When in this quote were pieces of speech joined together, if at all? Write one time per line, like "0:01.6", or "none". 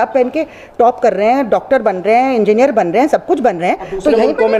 none